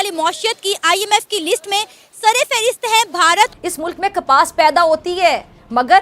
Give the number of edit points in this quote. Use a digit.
1